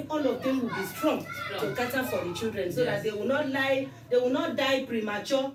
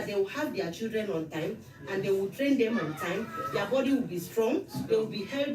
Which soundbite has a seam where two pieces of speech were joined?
second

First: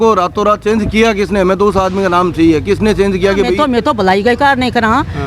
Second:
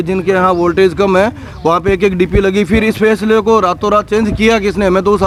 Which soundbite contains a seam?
first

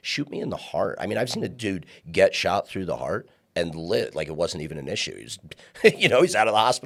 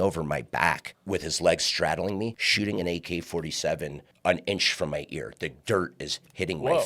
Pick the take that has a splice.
second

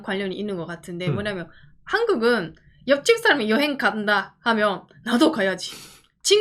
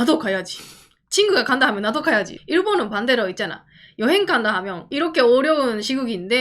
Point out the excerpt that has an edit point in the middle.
second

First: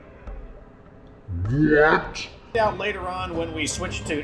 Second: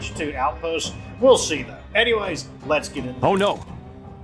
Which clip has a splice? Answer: first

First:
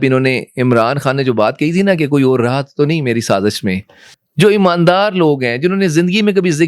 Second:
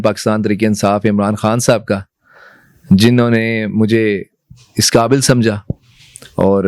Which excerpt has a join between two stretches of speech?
first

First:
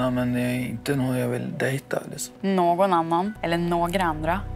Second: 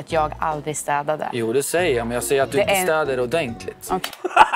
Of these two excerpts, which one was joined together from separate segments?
first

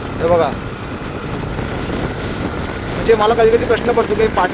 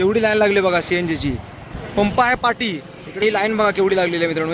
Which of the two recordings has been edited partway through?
second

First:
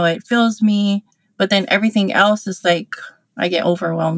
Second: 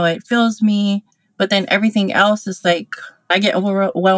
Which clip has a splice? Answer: second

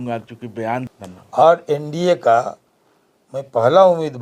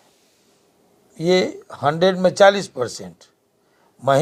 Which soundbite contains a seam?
first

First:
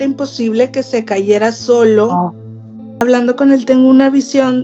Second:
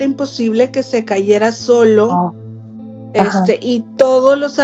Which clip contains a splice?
first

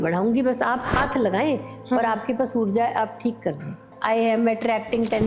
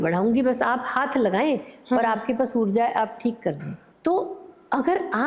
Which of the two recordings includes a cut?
first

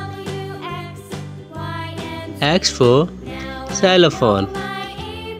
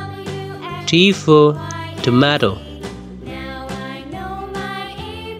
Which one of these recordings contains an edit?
second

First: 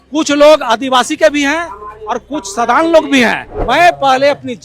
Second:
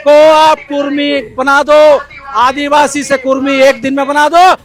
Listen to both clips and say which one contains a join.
first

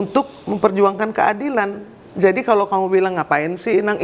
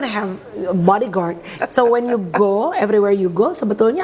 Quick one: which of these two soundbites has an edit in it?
second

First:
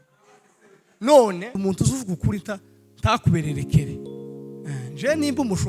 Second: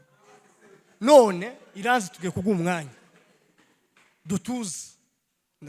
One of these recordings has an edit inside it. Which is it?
first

